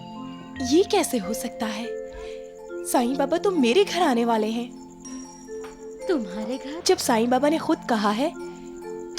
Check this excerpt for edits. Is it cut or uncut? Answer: cut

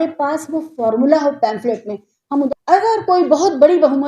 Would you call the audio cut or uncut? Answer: cut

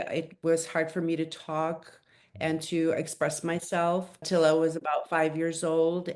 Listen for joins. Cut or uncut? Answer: uncut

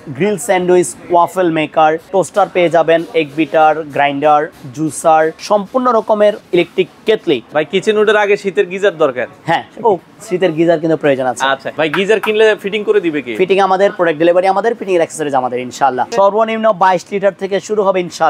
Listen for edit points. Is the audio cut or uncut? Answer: cut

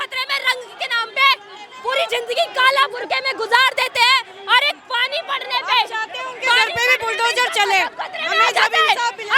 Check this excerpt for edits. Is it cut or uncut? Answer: uncut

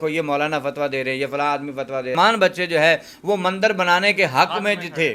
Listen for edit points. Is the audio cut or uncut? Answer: cut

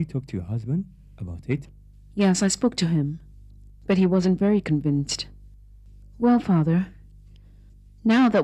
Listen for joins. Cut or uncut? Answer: uncut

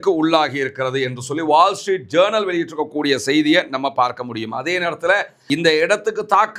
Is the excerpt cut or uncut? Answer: cut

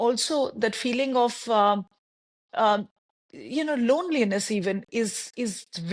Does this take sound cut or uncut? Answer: uncut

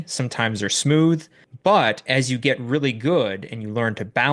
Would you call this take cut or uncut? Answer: uncut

